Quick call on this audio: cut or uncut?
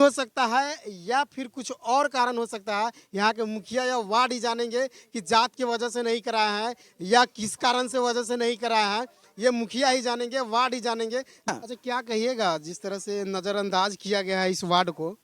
cut